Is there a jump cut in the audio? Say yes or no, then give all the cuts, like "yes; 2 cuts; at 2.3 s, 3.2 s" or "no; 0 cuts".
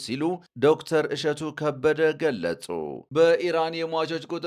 yes; 1 cut; at 3.1 s